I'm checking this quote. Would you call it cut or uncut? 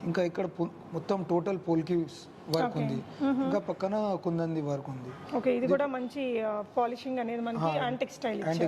uncut